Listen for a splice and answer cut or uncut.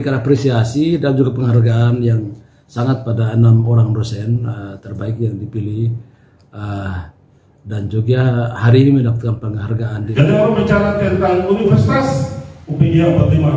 cut